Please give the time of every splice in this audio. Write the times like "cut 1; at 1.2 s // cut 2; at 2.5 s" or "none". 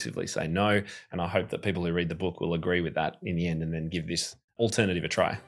cut 1; at 4.6 s